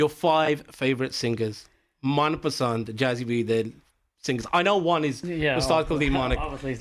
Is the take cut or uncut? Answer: uncut